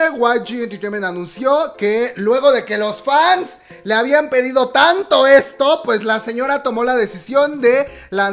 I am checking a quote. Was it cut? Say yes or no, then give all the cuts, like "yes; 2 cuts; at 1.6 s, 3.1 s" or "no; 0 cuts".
no; 0 cuts